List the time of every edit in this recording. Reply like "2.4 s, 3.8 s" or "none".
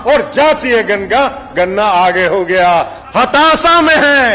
3.0 s